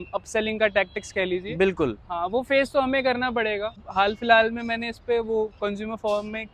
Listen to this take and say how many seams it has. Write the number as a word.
one